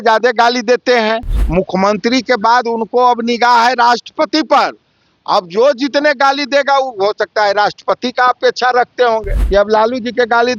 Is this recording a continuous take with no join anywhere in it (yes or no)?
no